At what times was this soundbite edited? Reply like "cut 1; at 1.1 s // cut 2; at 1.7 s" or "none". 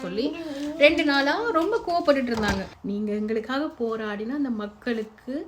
cut 1; at 2.7 s